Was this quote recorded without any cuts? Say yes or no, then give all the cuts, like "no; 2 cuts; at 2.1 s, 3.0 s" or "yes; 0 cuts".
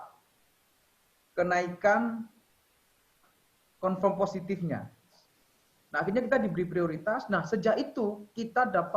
no; 1 cut; at 5.2 s